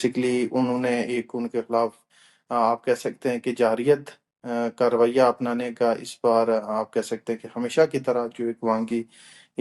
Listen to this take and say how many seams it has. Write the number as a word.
zero